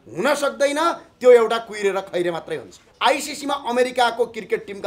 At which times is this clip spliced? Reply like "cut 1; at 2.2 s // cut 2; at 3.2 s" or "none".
cut 1; at 2.8 s